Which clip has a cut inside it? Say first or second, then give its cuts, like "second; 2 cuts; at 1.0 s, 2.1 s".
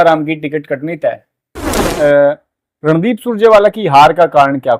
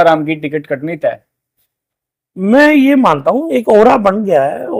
first; 1 cut; at 1.8 s